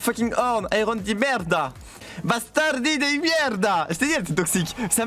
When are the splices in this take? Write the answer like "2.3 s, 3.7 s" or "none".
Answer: none

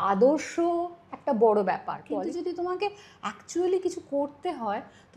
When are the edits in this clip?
2.0 s

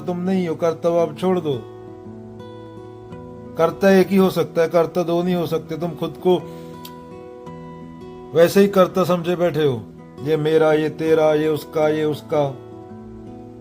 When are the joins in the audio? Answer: 12.5 s

